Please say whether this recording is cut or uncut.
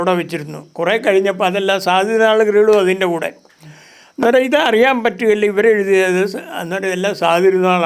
uncut